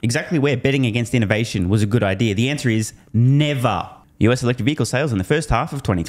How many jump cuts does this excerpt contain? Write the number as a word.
one